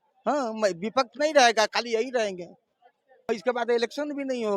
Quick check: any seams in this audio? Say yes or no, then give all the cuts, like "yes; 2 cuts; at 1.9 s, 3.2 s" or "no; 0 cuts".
yes; 1 cut; at 3.3 s